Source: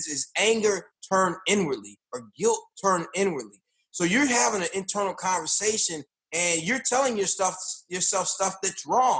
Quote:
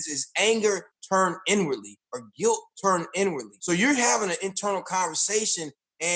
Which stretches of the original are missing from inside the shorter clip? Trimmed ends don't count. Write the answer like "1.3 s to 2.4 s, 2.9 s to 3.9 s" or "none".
3.5 s to 3.8 s